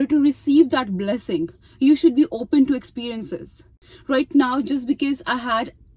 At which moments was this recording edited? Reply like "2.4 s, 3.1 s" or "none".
none